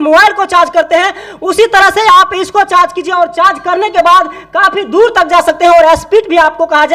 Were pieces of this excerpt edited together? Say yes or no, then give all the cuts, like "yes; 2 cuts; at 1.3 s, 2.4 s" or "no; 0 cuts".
no; 0 cuts